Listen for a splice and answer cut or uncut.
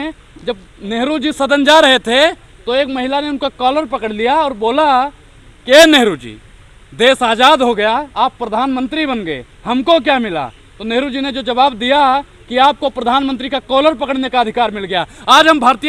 uncut